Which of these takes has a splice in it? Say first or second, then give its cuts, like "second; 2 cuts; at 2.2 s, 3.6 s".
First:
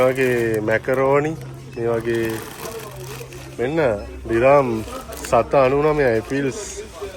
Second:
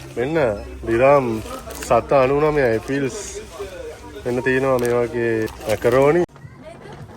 second; 2 cuts; at 5.5 s, 6.3 s